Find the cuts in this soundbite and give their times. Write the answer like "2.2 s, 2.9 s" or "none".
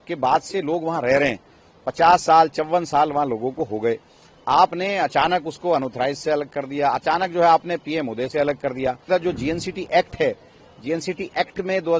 9.1 s

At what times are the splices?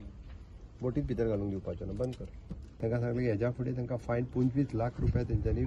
2.6 s

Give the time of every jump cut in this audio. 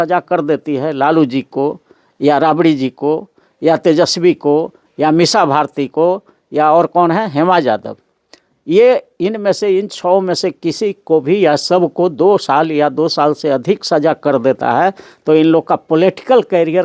none

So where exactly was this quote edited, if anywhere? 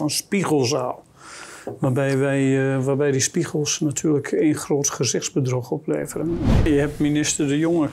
6.6 s

